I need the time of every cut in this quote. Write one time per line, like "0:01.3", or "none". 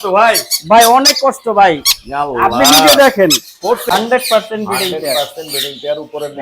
0:03.9